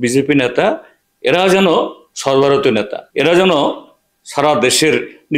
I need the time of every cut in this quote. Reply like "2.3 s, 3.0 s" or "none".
3.0 s